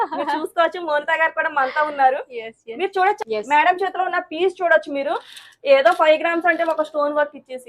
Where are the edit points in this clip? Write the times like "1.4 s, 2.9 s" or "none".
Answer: 3.2 s